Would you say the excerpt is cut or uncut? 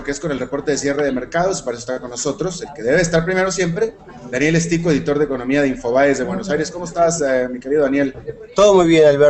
uncut